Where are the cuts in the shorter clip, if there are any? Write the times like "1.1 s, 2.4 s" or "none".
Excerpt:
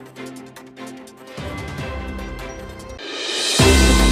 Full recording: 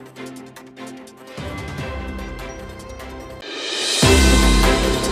3.0 s